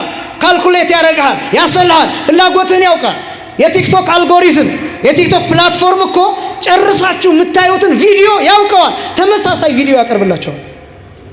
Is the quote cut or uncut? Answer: uncut